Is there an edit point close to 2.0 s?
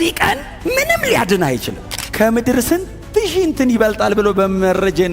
yes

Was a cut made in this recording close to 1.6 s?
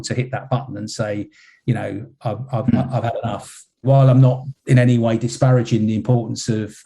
no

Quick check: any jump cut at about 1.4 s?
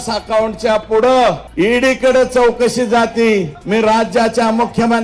yes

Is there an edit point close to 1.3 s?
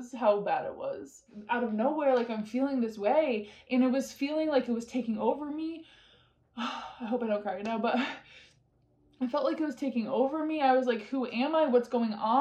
yes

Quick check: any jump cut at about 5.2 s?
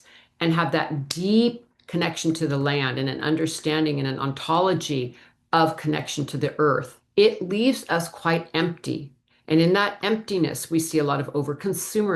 no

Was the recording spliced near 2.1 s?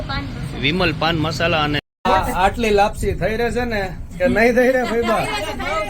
yes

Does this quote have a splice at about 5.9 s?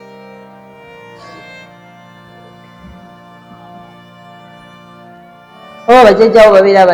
yes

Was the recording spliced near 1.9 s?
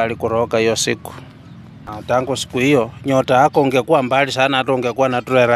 yes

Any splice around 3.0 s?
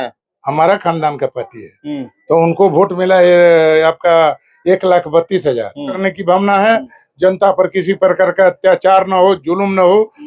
no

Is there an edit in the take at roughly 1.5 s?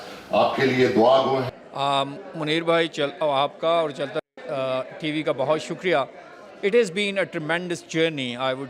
yes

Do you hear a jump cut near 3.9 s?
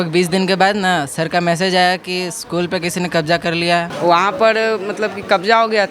yes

